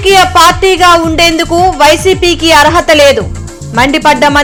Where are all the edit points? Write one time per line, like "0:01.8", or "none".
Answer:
none

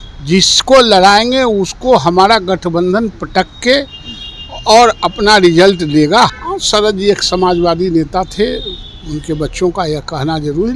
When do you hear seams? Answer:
0:06.3

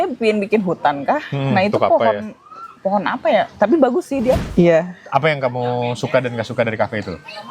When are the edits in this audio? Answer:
0:04.4

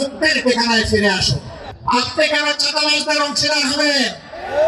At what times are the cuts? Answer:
0:01.7

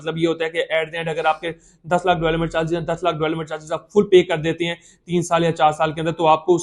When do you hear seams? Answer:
none

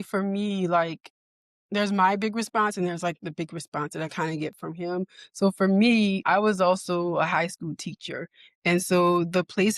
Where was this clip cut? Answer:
0:06.2

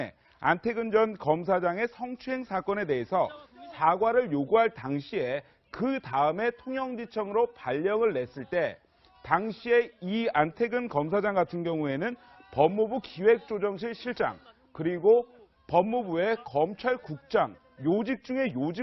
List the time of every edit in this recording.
0:09.0

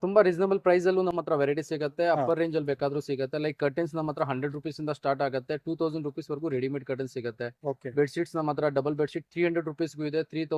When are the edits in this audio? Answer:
none

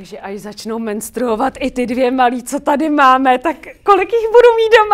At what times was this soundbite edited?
none

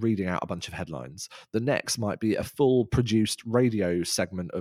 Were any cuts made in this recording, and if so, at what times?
none

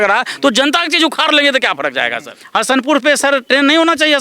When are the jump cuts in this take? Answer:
0:02.3

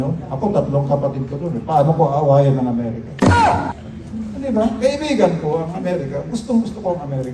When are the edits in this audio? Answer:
none

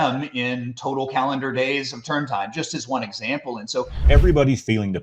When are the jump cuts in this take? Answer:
0:04.0

